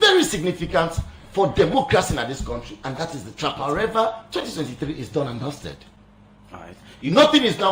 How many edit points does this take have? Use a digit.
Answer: 1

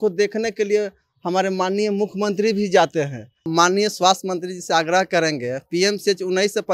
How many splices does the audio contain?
1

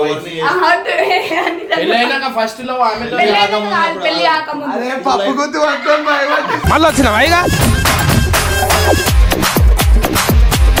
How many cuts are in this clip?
0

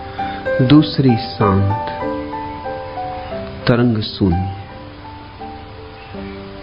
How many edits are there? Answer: 2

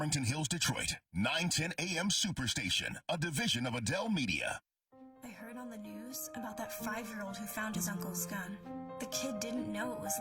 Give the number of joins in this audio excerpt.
1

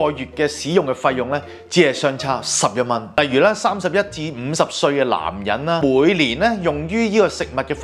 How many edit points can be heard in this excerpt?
2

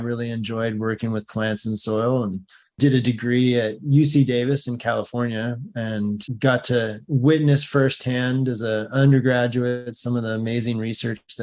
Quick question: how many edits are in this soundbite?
0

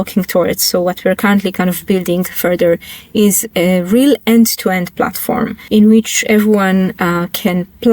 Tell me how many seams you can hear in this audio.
2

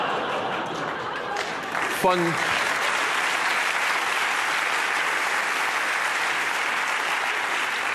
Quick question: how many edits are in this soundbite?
1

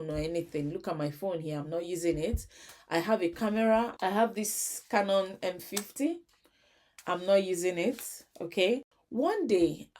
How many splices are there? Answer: 2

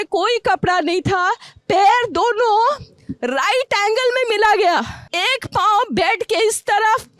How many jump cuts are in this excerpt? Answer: 1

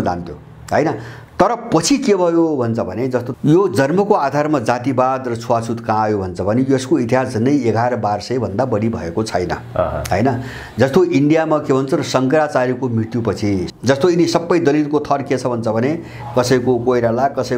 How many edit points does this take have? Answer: 2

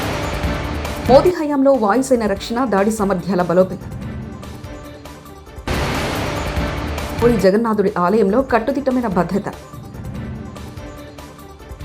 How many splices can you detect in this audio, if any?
1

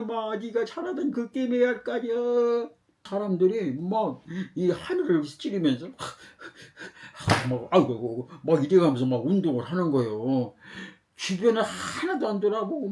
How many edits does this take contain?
1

